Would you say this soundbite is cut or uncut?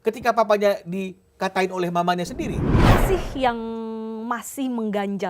cut